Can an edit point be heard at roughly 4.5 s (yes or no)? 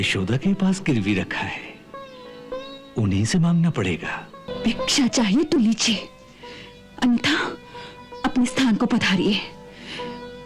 yes